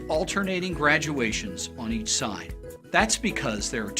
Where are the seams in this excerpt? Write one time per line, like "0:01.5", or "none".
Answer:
0:02.8